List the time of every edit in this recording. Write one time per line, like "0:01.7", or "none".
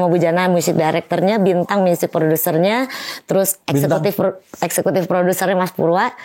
none